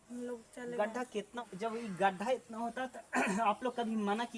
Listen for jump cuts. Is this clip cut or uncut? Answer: cut